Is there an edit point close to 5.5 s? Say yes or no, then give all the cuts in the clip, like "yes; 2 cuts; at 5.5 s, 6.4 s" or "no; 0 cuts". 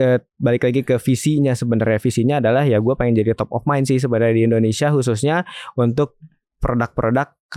no; 0 cuts